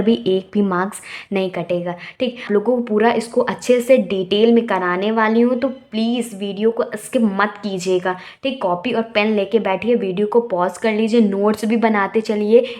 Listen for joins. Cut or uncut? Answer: cut